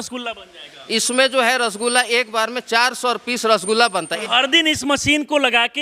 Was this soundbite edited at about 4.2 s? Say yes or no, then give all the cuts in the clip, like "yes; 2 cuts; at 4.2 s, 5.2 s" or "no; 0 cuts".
yes; 1 cut; at 4.2 s